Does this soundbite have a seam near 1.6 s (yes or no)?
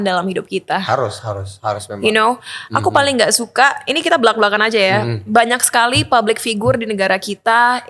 no